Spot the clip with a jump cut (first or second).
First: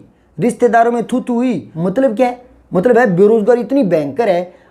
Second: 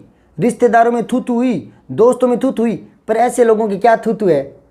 first